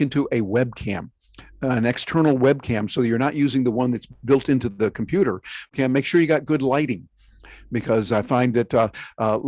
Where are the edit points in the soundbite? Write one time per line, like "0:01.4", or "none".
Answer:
0:05.7